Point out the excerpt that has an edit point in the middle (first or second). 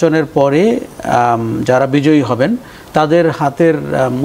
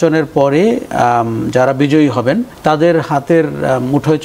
second